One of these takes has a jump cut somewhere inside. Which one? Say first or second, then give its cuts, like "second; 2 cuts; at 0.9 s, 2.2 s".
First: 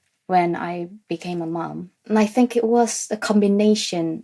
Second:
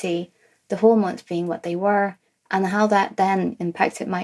first; 1 cut; at 1.9 s